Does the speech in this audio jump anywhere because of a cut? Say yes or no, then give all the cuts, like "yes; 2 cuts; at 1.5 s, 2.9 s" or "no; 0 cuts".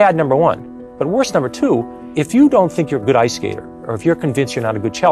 yes; 1 cut; at 2.0 s